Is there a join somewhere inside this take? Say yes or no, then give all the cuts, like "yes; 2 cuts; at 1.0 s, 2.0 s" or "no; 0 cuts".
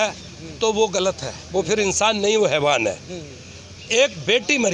no; 0 cuts